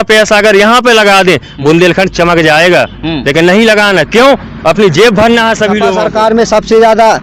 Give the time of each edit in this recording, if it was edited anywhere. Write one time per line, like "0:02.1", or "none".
0:05.9